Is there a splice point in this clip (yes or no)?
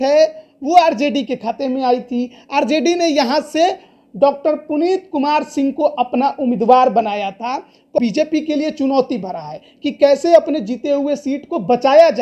yes